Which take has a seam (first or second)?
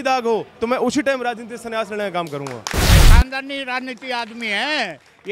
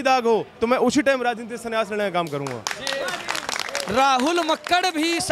first